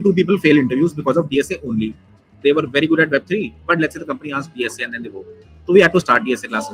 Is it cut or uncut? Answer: uncut